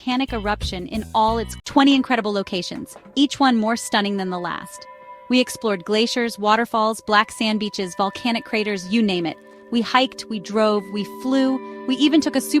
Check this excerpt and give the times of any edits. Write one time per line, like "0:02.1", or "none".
0:01.6